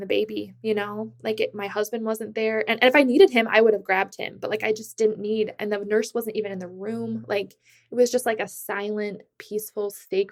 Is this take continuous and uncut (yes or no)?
yes